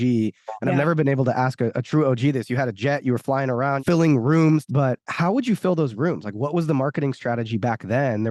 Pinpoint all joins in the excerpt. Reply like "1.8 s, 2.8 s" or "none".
3.8 s, 4.7 s

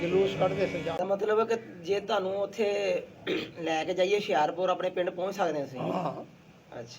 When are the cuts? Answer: 1.0 s

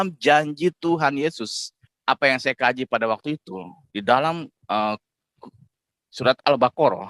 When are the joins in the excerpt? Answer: 1.9 s

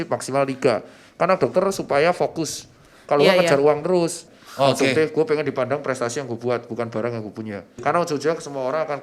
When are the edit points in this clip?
4.2 s, 7.6 s

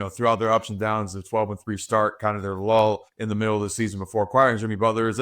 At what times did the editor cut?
3.1 s

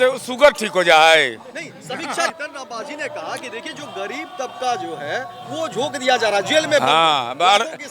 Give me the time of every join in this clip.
2.3 s

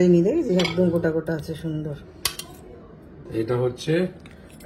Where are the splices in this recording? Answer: 2.1 s, 3.3 s

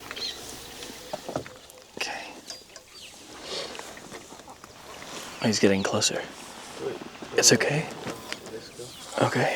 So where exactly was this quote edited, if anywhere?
0.9 s

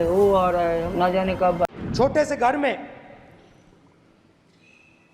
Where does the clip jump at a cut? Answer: 1.7 s

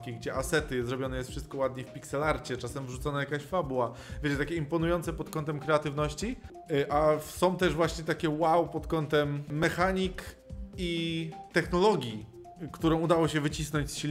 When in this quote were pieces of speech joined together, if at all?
6.5 s, 9.6 s, 11.4 s

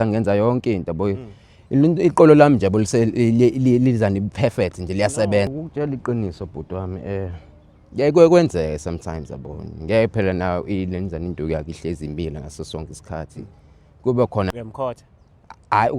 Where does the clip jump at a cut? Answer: 5.5 s, 14.5 s

